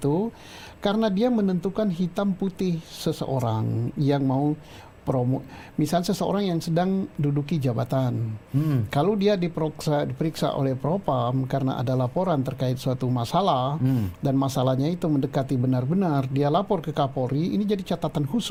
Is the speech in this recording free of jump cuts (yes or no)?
yes